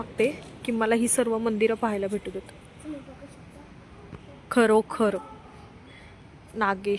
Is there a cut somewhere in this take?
no; 0 cuts

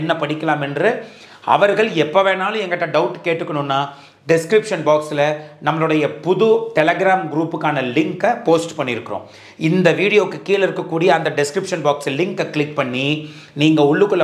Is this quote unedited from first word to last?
yes; 0 cuts

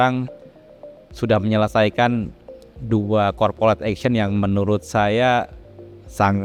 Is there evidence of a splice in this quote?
no; 0 cuts

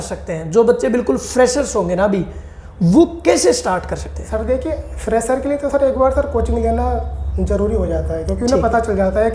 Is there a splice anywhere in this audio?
no; 0 cuts

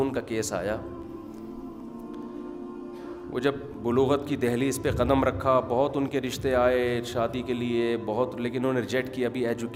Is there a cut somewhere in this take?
no; 0 cuts

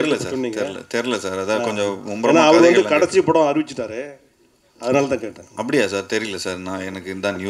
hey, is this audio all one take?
yes; 0 cuts

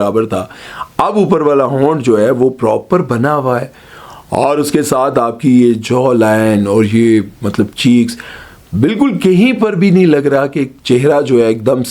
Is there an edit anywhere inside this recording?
no; 0 cuts

